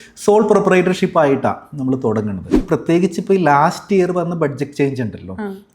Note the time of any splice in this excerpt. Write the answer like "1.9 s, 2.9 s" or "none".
2.6 s